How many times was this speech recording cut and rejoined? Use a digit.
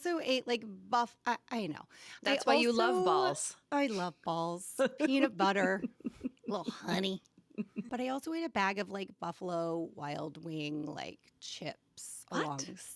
1